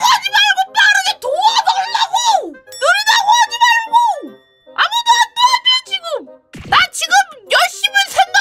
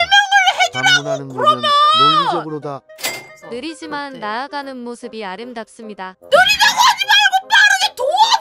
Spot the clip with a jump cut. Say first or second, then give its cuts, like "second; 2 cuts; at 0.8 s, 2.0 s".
first; 2 cuts; at 2.6 s, 6.5 s